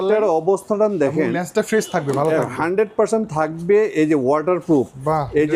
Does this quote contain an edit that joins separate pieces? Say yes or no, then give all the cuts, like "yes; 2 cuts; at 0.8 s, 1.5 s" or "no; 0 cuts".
no; 0 cuts